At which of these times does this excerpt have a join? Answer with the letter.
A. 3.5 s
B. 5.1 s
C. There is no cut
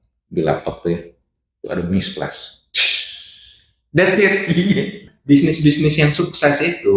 B